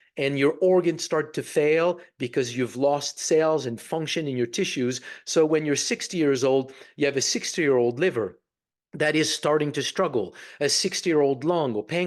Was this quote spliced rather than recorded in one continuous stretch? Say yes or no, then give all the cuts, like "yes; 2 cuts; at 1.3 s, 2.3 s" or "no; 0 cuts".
no; 0 cuts